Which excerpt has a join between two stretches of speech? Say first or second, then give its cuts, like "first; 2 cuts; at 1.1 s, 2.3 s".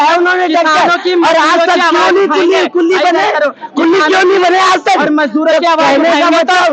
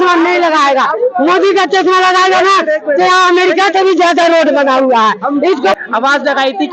second; 1 cut; at 5.8 s